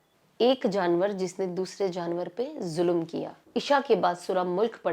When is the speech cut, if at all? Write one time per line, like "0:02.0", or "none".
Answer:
0:03.4